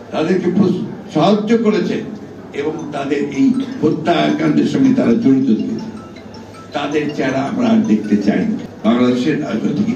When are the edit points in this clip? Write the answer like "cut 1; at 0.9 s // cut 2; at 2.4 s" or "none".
cut 1; at 8.7 s